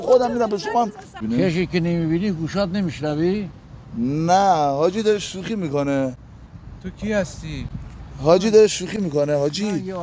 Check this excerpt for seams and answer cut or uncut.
cut